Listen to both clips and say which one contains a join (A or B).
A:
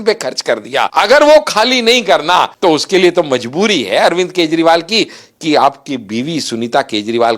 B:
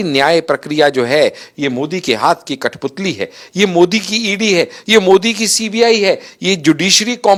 A